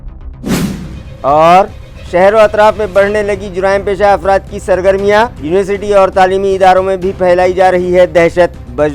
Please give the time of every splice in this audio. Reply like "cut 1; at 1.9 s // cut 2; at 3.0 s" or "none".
cut 1; at 1.0 s